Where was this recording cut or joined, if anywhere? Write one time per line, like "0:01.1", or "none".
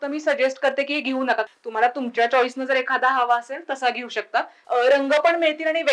0:01.4
0:04.6